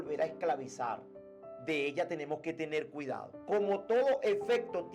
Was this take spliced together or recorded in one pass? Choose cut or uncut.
uncut